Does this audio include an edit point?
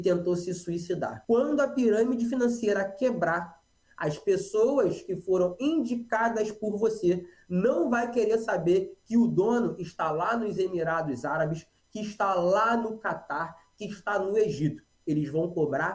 yes; 1 cut; at 1.1 s

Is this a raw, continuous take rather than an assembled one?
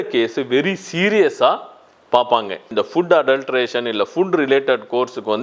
no; 1 cut; at 2.7 s

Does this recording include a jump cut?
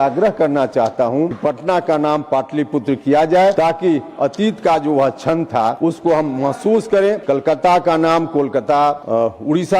yes; 5 cuts; at 1.3 s, 3.5 s, 5.8 s, 7.2 s, 9.0 s

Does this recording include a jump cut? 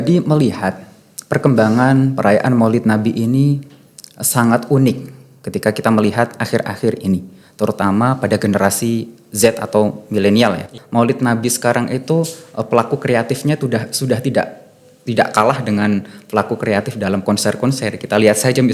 yes; 1 cut; at 10.7 s

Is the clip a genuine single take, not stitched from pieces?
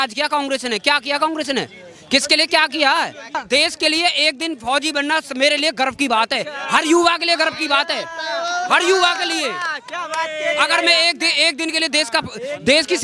no; 1 cut; at 3.4 s

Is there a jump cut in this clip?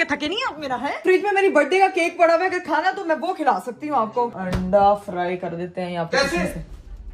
yes; 2 cuts; at 1.0 s, 4.3 s

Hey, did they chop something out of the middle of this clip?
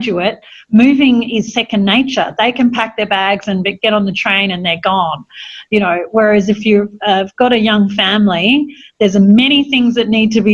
no; 0 cuts

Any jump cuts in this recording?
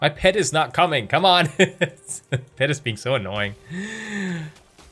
no; 0 cuts

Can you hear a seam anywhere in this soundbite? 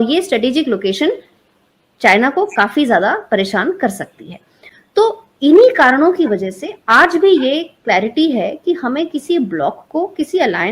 no; 0 cuts

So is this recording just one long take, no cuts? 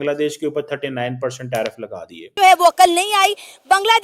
no; 1 cut; at 2.3 s

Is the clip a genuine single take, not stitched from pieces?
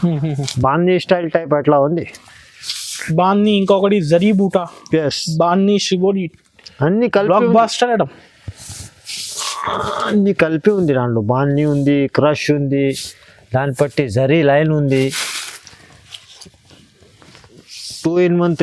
yes; 0 cuts

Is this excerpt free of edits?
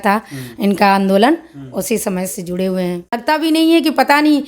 no; 1 cut; at 3.2 s

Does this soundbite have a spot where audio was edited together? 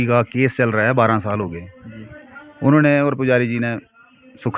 no; 0 cuts

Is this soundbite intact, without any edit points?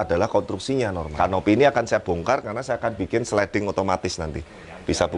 no; 1 cut; at 1.0 s

